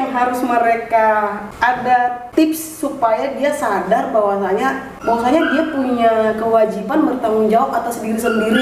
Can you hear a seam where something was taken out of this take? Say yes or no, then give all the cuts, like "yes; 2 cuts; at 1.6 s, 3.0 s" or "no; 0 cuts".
yes; 2 cuts; at 2.2 s, 4.9 s